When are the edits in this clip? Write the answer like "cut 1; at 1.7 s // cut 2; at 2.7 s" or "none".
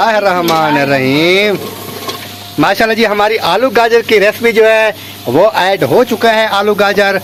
none